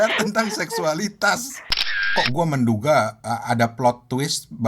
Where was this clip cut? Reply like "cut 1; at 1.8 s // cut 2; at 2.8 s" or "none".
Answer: cut 1; at 1.7 s